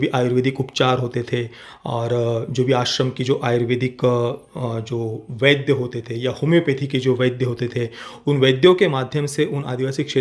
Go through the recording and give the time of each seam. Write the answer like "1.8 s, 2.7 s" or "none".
none